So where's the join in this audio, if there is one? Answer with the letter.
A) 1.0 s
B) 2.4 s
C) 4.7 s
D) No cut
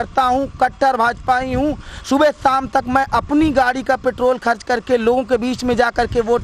D